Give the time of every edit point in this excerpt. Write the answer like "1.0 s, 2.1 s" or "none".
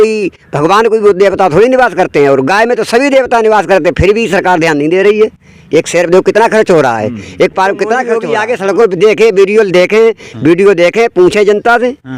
8.2 s